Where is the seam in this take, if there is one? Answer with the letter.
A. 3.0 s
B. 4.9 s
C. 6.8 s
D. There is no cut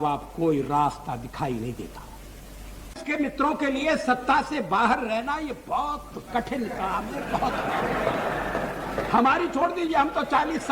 A